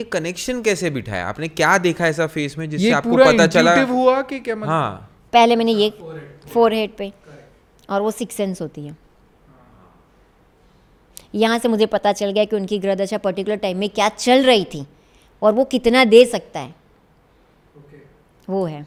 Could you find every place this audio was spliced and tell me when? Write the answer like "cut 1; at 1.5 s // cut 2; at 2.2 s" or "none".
none